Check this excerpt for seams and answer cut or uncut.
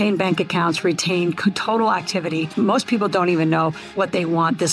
cut